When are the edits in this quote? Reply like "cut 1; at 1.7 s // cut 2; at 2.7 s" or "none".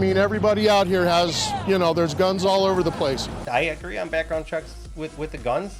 none